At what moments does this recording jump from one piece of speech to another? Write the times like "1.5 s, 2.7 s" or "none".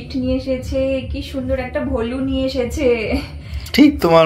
none